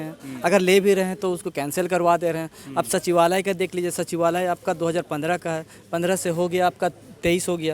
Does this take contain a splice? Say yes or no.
no